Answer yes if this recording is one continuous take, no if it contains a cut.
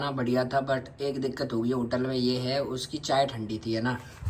yes